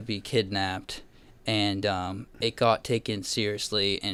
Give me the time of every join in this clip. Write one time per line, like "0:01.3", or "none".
none